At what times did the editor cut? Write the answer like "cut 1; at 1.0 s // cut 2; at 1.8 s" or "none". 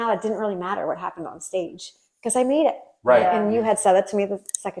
none